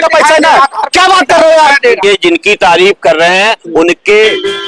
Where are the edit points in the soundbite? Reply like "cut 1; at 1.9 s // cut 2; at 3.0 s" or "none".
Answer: cut 1; at 2.0 s